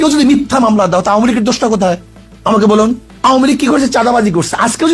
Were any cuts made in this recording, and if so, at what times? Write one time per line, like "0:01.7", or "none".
0:03.1